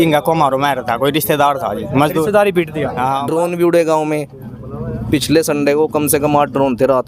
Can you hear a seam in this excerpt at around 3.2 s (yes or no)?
yes